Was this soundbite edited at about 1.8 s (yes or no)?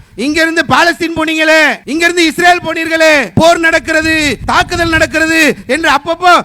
yes